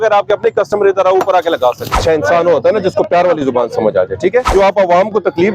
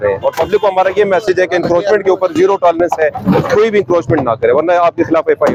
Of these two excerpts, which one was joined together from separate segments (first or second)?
first